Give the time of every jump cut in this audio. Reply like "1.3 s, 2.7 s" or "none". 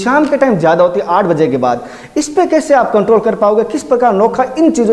none